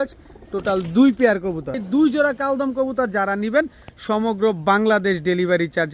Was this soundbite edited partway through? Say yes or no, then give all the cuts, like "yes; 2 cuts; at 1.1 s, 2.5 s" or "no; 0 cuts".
yes; 1 cut; at 1.8 s